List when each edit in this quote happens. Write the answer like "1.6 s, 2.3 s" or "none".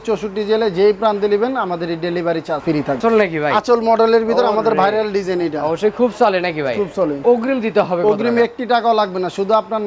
2.9 s, 7.2 s